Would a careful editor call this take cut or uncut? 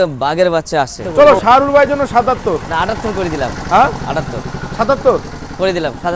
cut